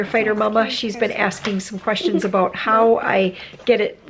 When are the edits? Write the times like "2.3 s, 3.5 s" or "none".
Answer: none